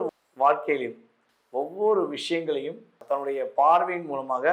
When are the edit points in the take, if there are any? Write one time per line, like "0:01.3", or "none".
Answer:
0:03.0